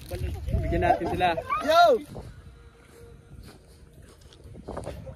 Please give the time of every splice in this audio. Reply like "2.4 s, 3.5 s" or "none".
2.1 s